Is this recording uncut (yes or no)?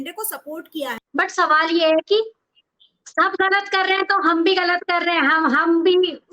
no